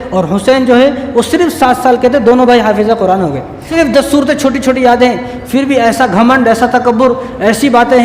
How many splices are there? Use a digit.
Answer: 1